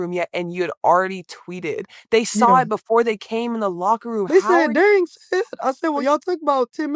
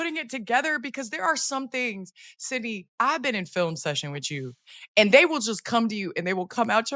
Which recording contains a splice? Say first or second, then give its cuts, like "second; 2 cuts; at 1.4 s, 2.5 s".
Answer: first; 2 cuts; at 4.3 s, 6.0 s